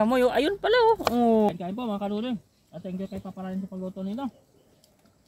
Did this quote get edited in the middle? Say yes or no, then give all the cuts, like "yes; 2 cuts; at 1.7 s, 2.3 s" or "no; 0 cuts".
yes; 1 cut; at 1.5 s